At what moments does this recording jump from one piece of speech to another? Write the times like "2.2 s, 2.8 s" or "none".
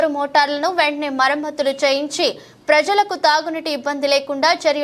none

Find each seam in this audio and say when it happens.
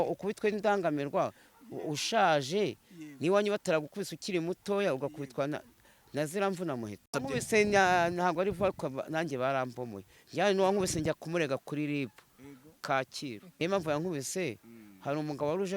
7.2 s, 13.6 s

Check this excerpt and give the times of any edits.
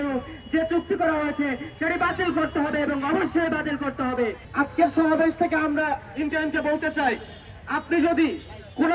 4.5 s

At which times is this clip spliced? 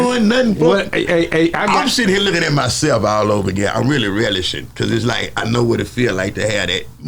none

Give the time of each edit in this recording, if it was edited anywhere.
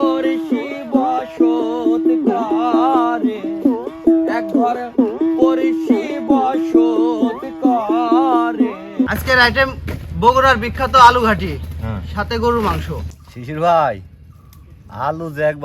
9.1 s, 13.4 s

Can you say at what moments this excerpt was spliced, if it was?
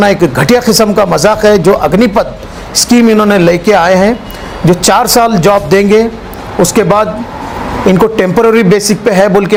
none

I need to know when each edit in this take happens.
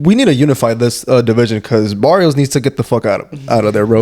none

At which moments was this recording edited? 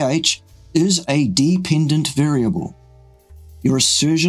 3.1 s

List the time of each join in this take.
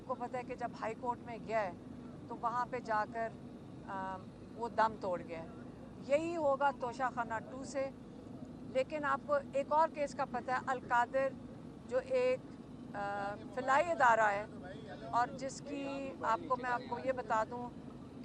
none

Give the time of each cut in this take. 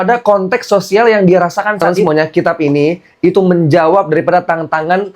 1.9 s

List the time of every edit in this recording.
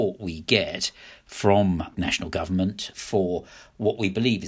1.9 s, 2.9 s

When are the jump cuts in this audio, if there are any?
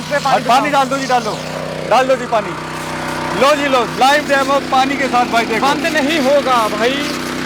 none

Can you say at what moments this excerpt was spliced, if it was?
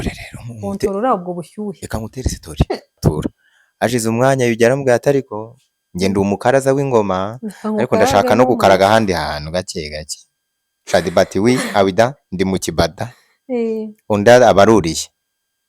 3.0 s

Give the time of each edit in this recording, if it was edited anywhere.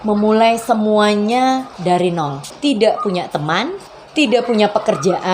1.7 s, 2.5 s

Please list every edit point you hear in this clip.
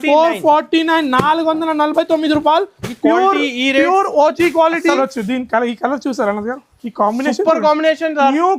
5.0 s

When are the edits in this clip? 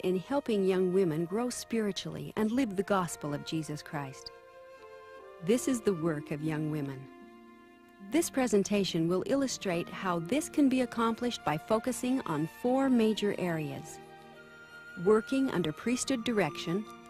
8.0 s

